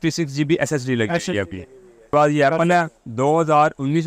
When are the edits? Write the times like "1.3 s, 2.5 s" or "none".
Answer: 2.1 s